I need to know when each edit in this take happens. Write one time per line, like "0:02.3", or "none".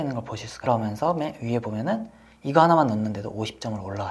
none